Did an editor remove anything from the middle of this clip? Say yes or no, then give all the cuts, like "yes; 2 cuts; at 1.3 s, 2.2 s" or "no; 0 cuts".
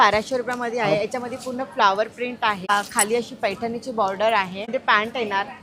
yes; 2 cuts; at 2.6 s, 4.6 s